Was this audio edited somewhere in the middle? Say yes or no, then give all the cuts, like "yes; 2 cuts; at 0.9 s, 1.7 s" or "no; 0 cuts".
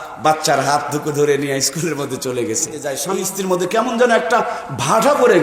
yes; 1 cut; at 2.9 s